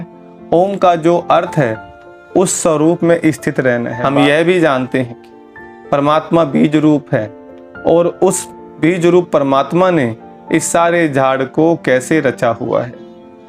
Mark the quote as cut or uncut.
cut